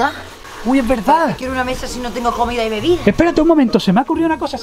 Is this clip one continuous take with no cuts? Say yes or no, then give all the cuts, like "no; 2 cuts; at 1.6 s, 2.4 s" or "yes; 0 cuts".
yes; 0 cuts